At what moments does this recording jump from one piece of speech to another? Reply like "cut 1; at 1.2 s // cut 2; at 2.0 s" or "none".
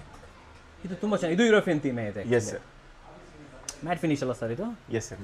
none